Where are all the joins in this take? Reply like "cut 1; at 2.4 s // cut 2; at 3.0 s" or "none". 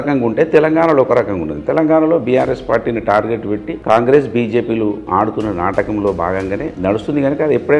none